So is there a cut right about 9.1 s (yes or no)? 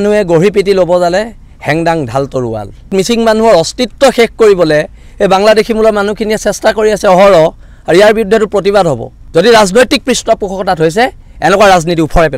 yes